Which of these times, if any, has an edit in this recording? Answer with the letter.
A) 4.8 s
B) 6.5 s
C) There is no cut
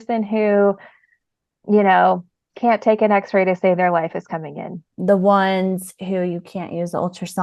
A